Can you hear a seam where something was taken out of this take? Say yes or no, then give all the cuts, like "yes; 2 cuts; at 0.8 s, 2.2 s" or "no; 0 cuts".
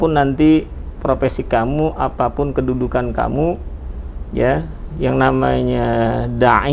no; 0 cuts